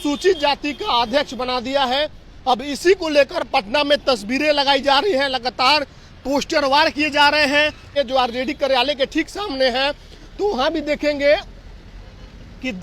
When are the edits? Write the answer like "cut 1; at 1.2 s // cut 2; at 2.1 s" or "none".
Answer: cut 1; at 7.9 s

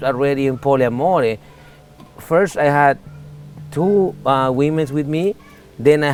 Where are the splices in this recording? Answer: none

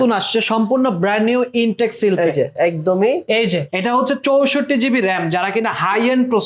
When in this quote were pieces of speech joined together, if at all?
cut 1; at 3.7 s

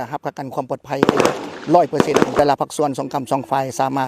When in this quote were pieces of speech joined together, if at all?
cut 1; at 2.4 s

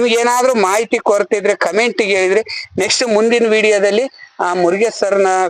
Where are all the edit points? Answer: none

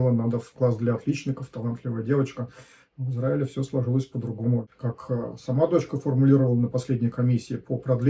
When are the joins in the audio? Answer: cut 1; at 4.7 s

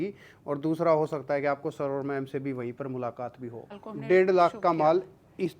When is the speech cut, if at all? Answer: cut 1; at 3.8 s

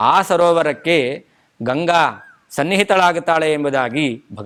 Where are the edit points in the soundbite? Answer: none

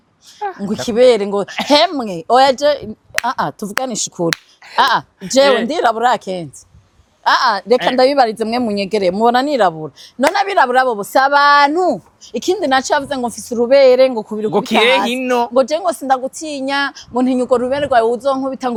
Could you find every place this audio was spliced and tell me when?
none

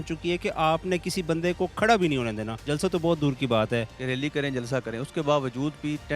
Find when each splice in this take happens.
cut 1; at 2.5 s // cut 2; at 4.0 s

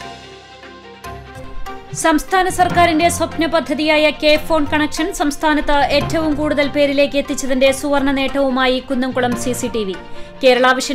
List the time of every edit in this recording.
cut 1; at 1.5 s

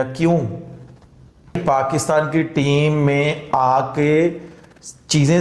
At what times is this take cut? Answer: cut 1; at 1.6 s

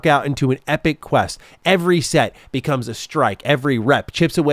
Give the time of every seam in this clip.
none

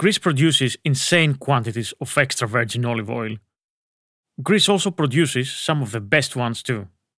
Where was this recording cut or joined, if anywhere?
none

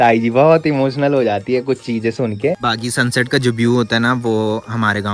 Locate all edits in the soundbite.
cut 1; at 2.6 s

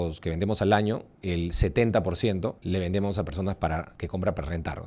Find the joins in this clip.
cut 1; at 1.1 s // cut 2; at 2.6 s // cut 3; at 4.0 s

